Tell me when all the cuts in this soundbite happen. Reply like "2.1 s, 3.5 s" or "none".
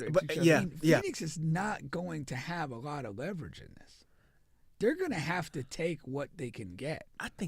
1.1 s